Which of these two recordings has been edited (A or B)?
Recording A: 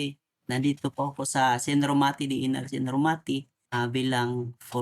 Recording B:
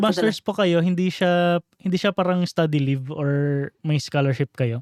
A